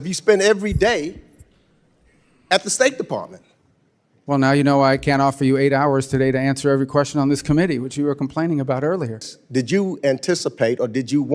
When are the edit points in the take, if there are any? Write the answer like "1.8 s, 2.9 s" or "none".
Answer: 9.4 s